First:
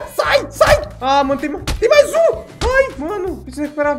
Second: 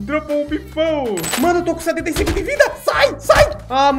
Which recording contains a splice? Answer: second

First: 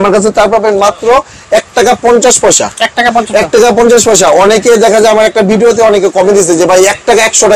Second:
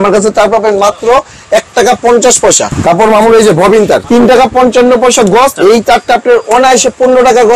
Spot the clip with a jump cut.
second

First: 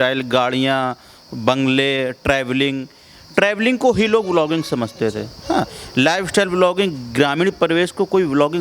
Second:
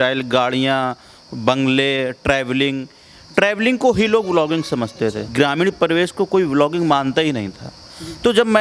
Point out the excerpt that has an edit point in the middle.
second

